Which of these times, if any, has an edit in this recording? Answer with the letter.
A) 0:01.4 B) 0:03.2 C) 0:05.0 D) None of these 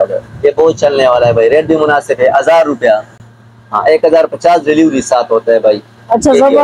D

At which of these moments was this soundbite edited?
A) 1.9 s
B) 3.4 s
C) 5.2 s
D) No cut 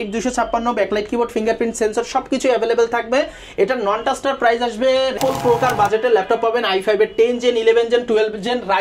C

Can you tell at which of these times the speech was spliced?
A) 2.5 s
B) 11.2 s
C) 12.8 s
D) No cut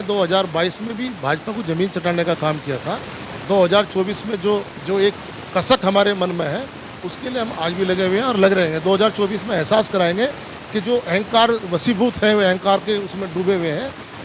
D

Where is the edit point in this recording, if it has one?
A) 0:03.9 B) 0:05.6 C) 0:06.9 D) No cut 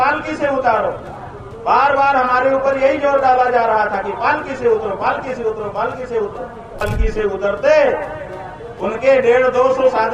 C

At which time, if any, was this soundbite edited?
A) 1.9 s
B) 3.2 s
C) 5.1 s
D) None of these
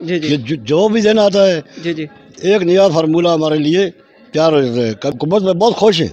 C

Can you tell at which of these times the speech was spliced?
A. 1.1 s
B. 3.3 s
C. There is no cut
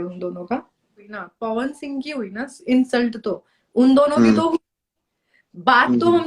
A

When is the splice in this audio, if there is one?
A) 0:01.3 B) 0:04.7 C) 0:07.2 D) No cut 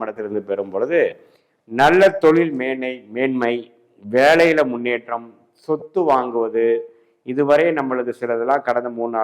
D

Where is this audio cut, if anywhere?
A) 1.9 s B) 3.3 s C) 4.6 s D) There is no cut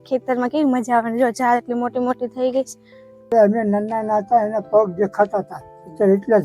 B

